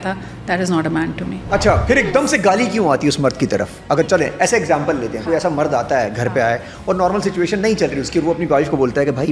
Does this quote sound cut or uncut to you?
cut